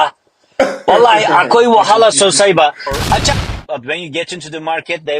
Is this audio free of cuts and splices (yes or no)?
no